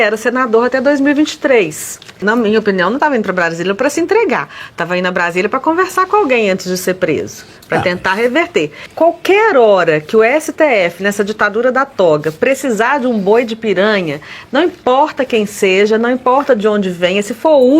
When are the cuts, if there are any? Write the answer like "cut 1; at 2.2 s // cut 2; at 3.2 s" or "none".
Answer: cut 1; at 2.2 s // cut 2; at 8.8 s